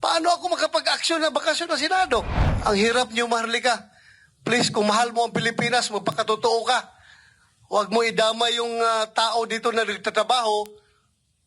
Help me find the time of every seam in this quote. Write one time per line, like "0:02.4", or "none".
0:02.4